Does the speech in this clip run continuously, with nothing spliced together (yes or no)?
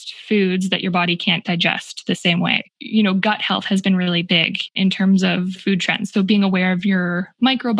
no